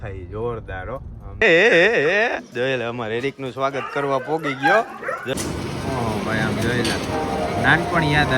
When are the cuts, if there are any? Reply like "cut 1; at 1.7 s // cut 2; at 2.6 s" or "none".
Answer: cut 1; at 1.4 s // cut 2; at 5.3 s